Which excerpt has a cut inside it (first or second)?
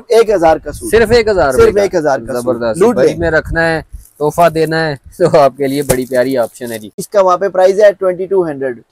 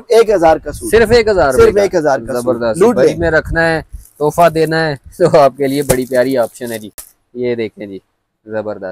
first